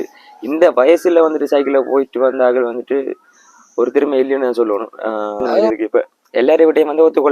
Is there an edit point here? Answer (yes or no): yes